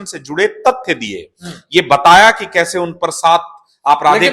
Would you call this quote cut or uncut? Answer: uncut